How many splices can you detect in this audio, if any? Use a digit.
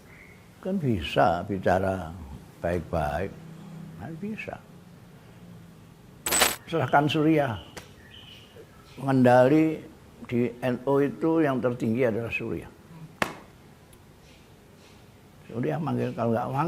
1